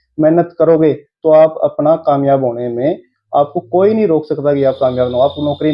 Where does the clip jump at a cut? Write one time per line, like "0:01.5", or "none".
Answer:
none

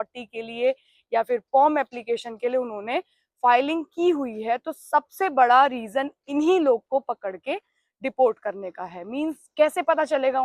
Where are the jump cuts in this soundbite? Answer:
none

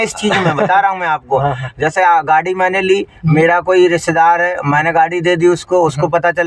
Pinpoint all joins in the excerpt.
none

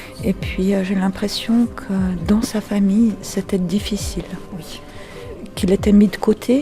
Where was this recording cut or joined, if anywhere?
0:05.4

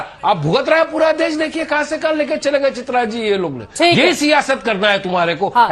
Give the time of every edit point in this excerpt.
none

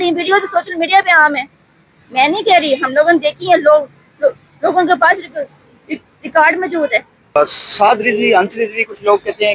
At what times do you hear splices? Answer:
0:07.4

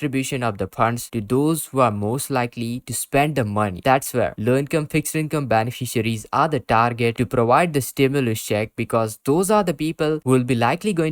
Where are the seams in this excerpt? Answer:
none

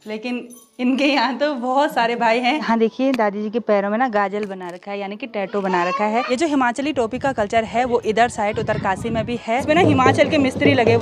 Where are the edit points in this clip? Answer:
0:02.6
0:06.3
0:09.6

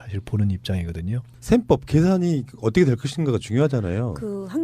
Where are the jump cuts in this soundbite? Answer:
0:02.7

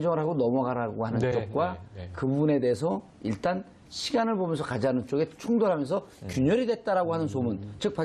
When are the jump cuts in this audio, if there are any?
0:01.3

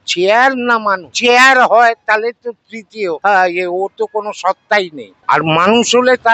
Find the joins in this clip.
0:01.1
0:03.2
0:05.1

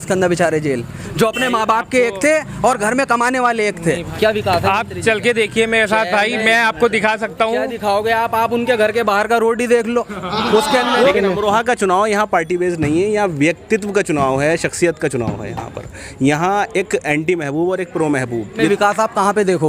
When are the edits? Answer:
0:04.1
0:11.1
0:18.7

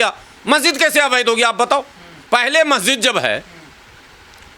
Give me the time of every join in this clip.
none

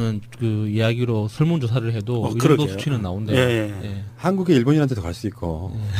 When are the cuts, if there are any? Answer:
0:04.3

